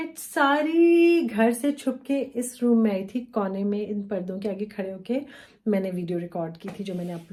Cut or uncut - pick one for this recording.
uncut